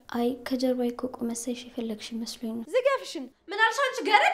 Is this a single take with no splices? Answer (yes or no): no